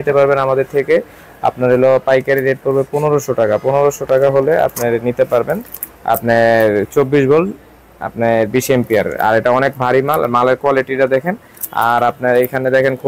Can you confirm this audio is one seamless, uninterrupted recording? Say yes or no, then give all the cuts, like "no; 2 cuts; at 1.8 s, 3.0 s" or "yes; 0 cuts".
yes; 0 cuts